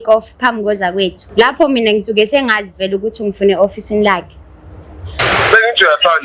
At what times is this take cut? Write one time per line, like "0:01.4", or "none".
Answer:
0:01.2
0:05.0

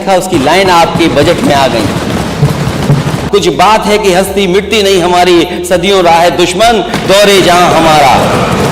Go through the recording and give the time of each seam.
0:03.2

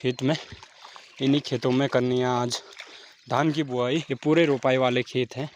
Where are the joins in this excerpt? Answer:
0:04.1

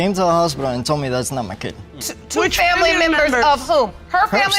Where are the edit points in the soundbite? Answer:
none

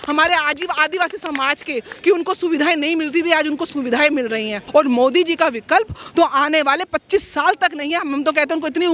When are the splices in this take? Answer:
0:04.6

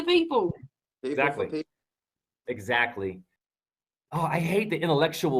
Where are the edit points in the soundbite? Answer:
0:03.3

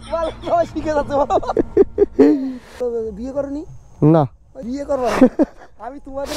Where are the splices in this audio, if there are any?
0:02.8

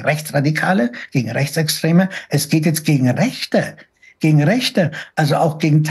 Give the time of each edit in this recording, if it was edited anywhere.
none

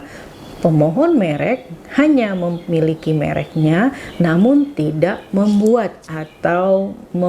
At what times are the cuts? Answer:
none

